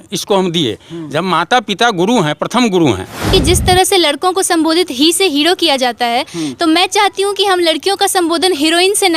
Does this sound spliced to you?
yes; 1 cut; at 3.3 s

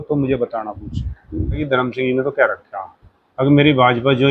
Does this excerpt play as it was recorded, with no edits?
no; 1 cut; at 1.6 s

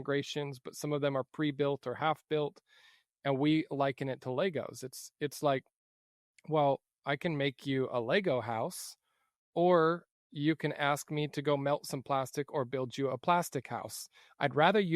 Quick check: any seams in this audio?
no; 0 cuts

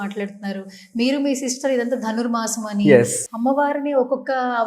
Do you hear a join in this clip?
yes; 1 cut; at 3.2 s

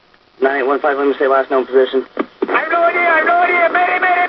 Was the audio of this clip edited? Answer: no; 0 cuts

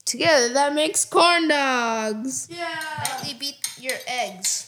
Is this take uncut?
no; 1 cut; at 3.3 s

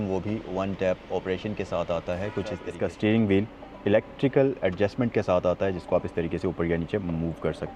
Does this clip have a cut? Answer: yes; 1 cut; at 2.6 s

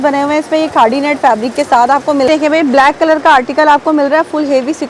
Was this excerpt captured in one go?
no; 1 cut; at 2.3 s

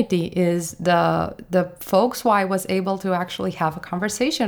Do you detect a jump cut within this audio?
no; 0 cuts

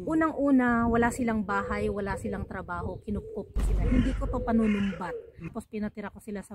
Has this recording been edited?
yes; 1 cut; at 5.5 s

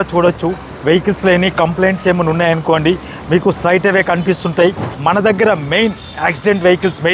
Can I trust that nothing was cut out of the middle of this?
no; 1 cut; at 4.9 s

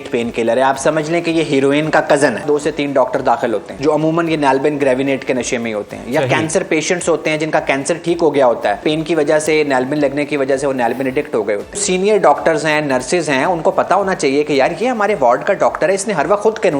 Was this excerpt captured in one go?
no; 4 cuts; at 2.4 s, 3.7 s, 8.8 s, 11.8 s

